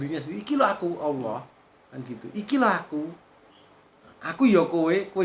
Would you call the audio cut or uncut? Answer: uncut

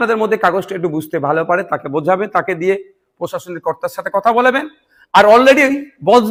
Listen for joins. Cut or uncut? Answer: uncut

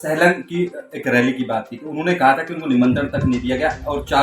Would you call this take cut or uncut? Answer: uncut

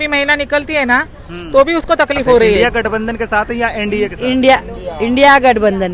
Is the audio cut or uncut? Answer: cut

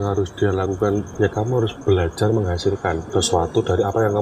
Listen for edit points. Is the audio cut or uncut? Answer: uncut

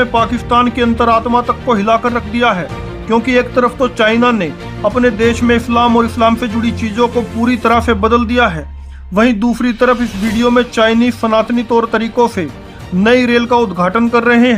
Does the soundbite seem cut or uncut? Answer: uncut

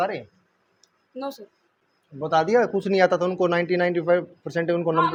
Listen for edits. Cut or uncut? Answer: uncut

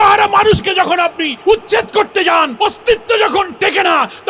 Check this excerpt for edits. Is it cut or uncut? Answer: cut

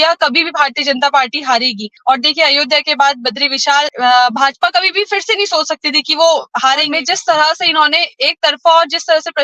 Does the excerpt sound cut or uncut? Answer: cut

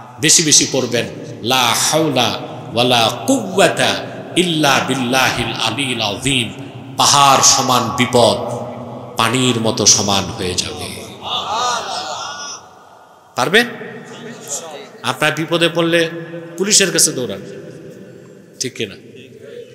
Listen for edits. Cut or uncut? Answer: uncut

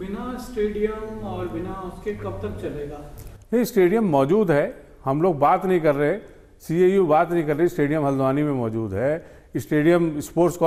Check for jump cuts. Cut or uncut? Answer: uncut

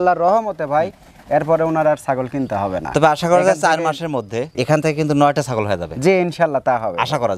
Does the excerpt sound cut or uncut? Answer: uncut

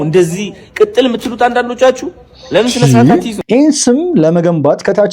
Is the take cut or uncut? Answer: cut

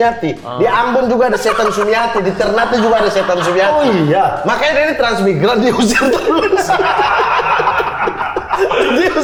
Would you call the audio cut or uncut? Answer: uncut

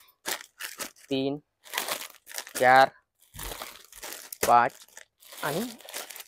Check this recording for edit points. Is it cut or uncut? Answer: uncut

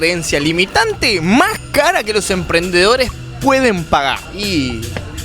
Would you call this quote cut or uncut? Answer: cut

